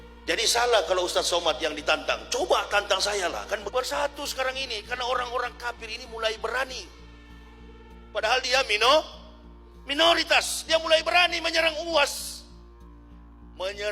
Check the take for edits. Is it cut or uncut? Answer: cut